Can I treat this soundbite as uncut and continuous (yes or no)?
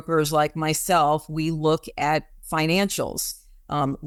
yes